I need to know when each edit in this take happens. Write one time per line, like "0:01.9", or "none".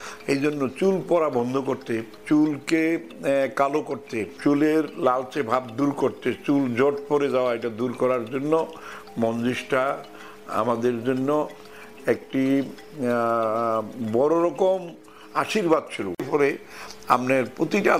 0:16.3